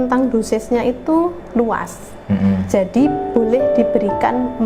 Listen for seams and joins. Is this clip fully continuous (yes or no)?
yes